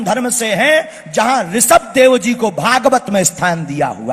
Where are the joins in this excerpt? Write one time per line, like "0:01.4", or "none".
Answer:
none

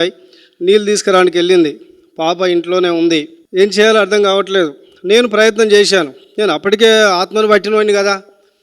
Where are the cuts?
0:03.4

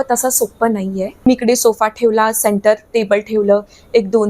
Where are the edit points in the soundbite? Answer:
0:01.1

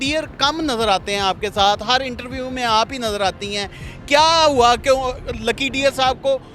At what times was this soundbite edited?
none

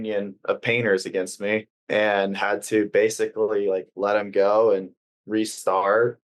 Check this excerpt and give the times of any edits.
0:01.8

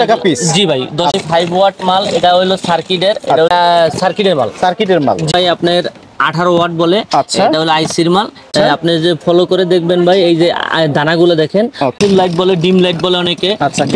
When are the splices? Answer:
0:01.1
0:03.5
0:05.3
0:08.5
0:11.9

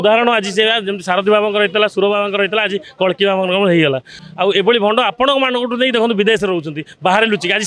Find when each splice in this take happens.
0:04.2

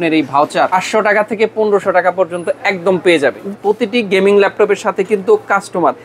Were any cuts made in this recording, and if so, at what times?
0:00.7
0:03.4

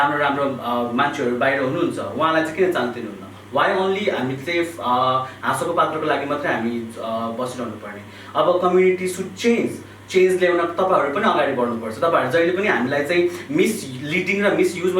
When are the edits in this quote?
none

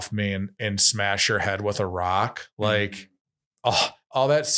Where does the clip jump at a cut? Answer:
none

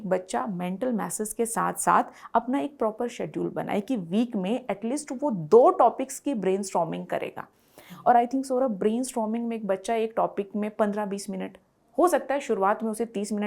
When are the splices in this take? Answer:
none

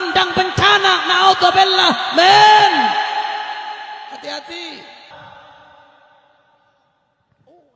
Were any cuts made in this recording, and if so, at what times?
0:05.1

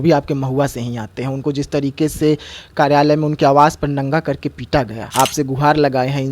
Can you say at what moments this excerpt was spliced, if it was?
0:05.0

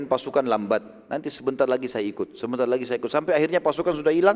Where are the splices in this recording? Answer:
none

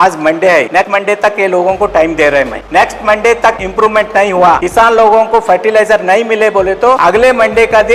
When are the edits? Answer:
0:00.8
0:02.6
0:03.6
0:04.6
0:07.0

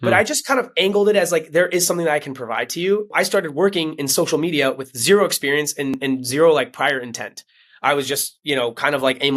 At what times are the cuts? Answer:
0:03.1
0:06.0

